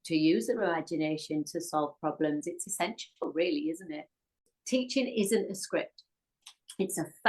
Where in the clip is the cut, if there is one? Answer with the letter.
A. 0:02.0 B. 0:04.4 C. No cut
B